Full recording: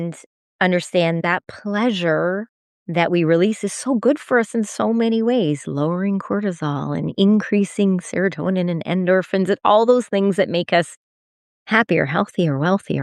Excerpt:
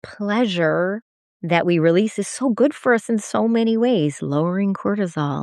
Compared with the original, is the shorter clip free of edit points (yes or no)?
yes